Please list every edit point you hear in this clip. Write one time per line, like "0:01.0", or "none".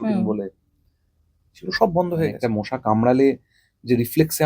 0:03.0